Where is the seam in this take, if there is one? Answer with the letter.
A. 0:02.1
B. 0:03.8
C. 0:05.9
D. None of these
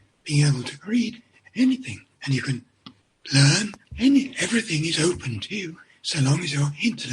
B